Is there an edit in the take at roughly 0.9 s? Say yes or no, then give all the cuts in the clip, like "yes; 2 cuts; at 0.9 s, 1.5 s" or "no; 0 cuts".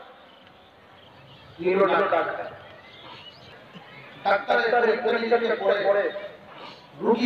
no; 1 cut; at 3.5 s